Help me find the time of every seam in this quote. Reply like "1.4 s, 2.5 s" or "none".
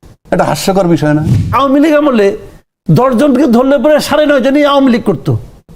1.5 s